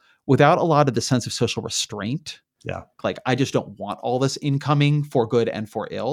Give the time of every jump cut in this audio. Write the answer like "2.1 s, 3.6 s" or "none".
3.0 s